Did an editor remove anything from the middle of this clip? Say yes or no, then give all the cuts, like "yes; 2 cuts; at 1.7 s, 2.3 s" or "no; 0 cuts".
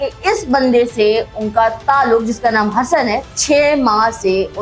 no; 0 cuts